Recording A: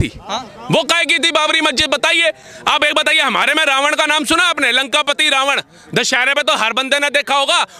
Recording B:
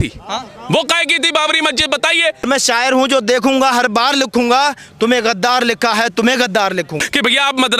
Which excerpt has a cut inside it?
B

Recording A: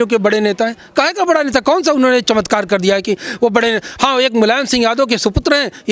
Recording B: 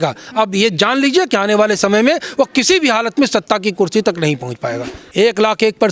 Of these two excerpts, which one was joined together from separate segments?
B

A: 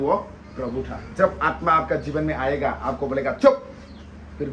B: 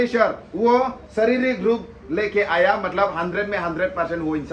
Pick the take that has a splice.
A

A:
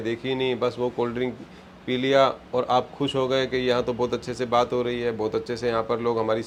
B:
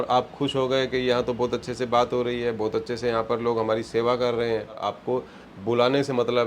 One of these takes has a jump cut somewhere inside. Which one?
B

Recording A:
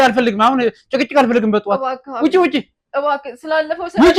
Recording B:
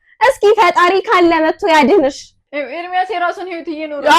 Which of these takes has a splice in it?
B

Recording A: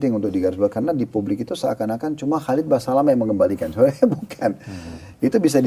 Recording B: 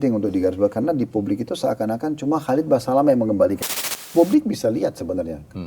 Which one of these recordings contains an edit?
B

